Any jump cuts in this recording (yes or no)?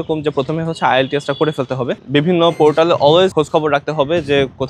yes